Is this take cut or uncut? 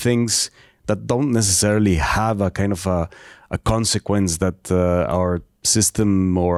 uncut